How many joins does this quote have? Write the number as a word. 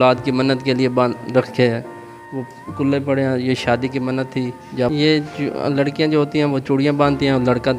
one